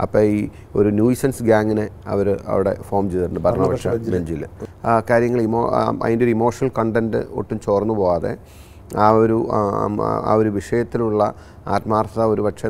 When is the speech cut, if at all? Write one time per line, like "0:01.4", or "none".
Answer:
0:04.6